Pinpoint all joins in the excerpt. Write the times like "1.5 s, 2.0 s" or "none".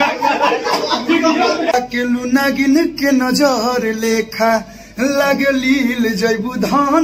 1.7 s